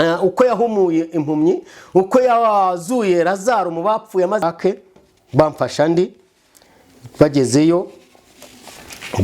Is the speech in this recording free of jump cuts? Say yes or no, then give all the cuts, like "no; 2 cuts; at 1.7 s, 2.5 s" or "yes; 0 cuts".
no; 1 cut; at 4.4 s